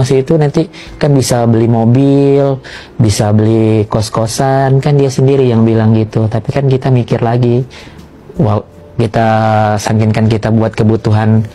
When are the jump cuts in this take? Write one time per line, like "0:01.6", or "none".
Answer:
none